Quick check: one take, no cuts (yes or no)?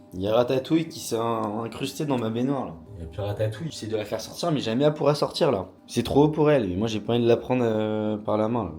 no